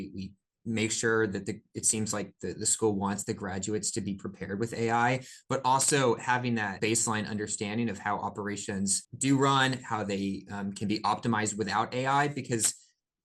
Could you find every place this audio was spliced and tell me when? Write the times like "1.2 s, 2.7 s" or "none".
6.7 s, 9.1 s